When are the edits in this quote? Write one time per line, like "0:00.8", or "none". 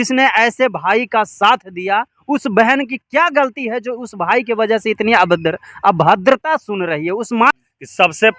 0:07.5